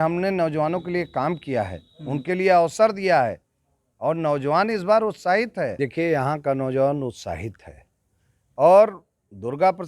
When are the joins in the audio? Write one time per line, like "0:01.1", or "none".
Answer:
0:05.7